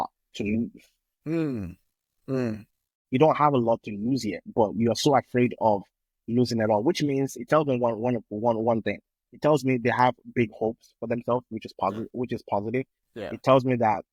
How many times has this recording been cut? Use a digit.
0